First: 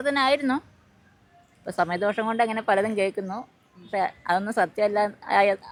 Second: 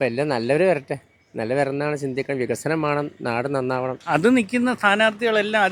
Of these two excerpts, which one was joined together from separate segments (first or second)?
second